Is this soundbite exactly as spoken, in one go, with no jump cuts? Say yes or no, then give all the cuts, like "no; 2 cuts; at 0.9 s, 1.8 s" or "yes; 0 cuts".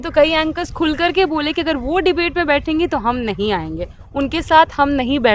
yes; 0 cuts